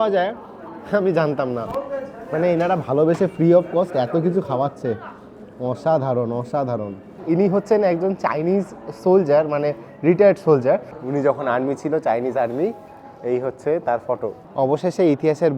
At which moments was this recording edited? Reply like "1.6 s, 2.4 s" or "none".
7.2 s, 11.0 s, 14.4 s